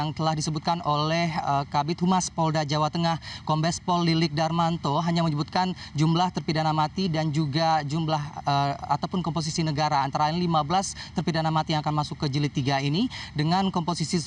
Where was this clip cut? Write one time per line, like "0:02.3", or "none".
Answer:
0:07.3

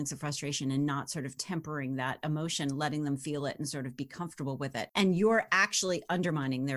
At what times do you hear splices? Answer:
0:04.9

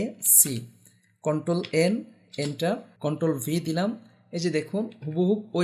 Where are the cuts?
0:02.9

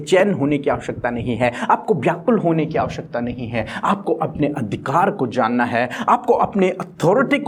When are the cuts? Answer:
none

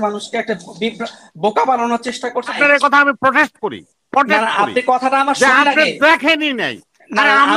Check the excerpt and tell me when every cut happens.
0:02.5

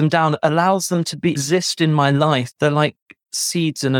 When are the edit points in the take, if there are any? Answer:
0:01.3
0:02.5

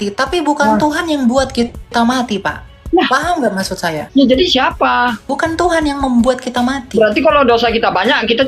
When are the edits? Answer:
0:04.0
0:05.3

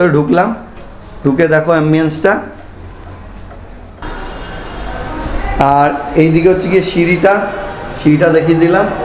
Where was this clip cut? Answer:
0:04.0

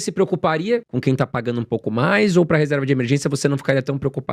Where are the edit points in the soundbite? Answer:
0:00.9

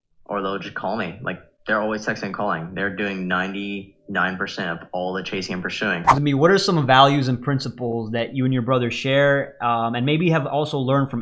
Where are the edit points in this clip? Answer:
0:06.1

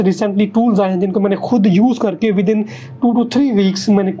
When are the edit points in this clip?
none

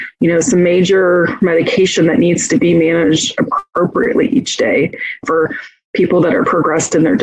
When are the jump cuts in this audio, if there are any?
0:05.2

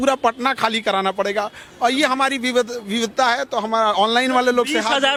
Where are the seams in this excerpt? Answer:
none

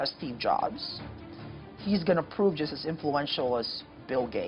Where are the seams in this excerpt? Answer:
none

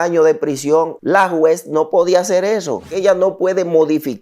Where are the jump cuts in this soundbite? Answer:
0:01.0
0:02.9

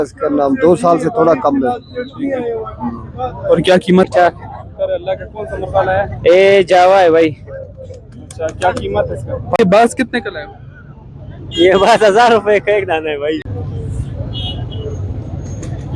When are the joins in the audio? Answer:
0:04.1
0:09.6
0:13.5

